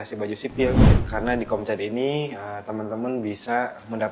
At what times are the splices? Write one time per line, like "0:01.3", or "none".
0:00.9